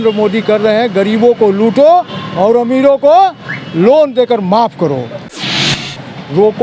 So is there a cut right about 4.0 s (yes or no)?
no